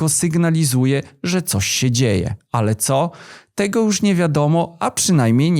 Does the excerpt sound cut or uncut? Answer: uncut